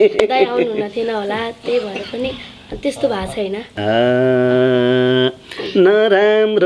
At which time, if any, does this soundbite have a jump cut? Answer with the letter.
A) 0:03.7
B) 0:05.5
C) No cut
A